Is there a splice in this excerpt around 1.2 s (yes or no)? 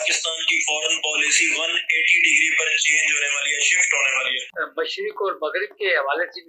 no